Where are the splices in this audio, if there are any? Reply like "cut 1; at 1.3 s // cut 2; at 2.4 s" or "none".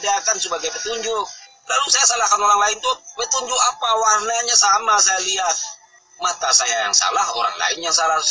none